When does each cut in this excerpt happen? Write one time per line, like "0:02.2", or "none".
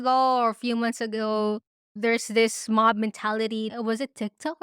0:03.7